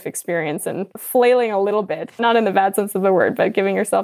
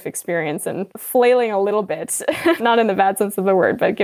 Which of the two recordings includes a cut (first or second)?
first